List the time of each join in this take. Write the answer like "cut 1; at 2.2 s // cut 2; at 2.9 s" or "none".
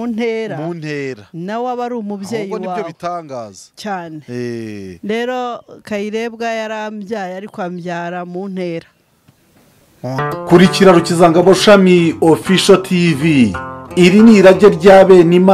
cut 1; at 10.2 s